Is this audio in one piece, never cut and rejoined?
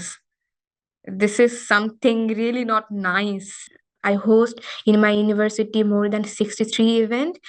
no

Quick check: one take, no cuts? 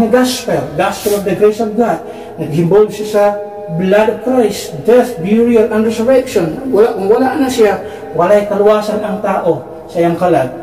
yes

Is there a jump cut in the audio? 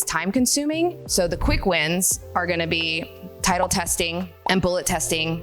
yes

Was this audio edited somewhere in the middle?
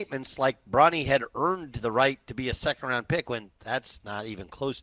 no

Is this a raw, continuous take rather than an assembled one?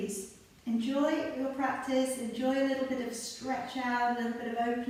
yes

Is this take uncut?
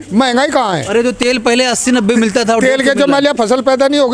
yes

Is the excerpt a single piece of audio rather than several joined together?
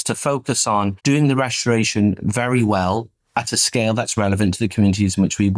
no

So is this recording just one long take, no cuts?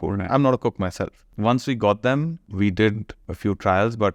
no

